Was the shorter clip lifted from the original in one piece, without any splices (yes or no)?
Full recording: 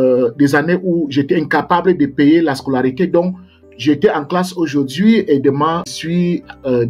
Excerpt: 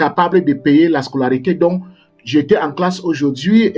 yes